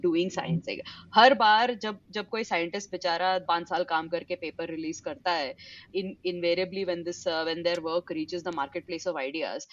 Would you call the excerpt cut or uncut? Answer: cut